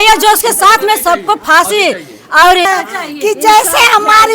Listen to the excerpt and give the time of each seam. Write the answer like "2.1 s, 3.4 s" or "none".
2.7 s